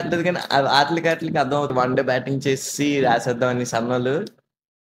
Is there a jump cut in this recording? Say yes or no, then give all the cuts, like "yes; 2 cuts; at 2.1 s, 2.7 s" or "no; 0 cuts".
yes; 1 cut; at 1.7 s